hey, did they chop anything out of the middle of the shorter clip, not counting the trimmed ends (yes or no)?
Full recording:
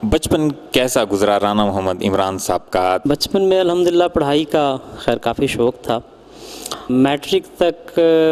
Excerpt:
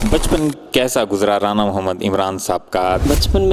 no